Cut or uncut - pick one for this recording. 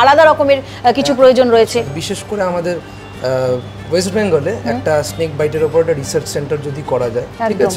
cut